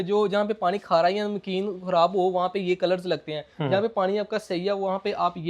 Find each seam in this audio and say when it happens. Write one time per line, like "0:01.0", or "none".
none